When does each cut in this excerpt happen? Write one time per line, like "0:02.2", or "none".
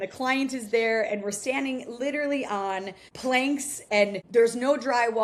none